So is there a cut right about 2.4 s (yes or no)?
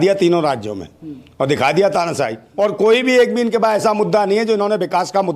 yes